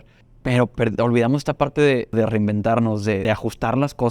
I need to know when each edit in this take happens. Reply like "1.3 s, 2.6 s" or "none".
2.1 s, 3.2 s